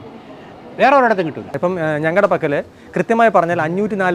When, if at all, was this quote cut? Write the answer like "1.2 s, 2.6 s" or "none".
1.5 s